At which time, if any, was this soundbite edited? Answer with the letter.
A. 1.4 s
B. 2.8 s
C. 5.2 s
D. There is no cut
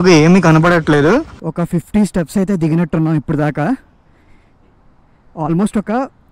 A